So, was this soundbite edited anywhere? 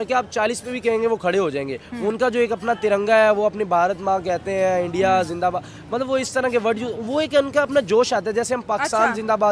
no; 0 cuts

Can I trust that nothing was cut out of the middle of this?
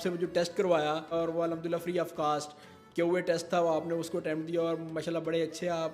no; 1 cut; at 1.1 s

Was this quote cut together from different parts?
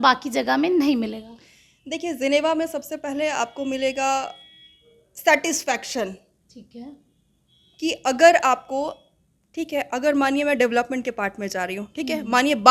no; 0 cuts

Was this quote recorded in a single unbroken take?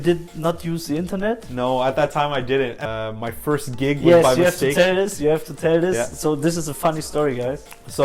no; 1 cut; at 2.8 s

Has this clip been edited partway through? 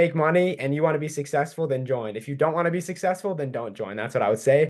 no; 0 cuts

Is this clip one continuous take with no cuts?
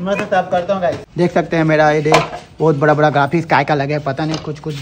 no; 1 cut; at 1.0 s

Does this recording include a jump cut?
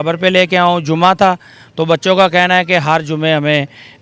no; 0 cuts

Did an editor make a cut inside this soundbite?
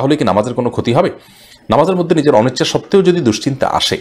no; 0 cuts

